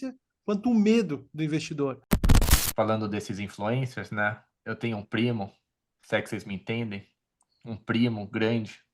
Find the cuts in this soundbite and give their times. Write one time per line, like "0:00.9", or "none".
0:02.5